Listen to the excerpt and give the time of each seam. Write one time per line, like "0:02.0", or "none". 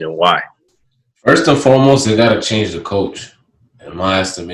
none